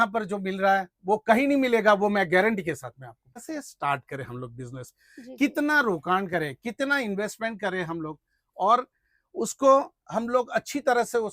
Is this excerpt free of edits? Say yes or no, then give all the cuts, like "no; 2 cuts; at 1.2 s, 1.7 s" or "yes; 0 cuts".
no; 1 cut; at 3.4 s